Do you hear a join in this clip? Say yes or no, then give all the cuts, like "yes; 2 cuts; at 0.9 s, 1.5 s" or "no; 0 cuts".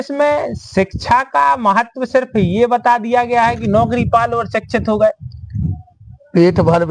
no; 0 cuts